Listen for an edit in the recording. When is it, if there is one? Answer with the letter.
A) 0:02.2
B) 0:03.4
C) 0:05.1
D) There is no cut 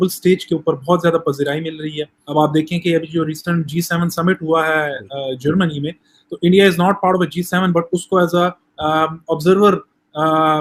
A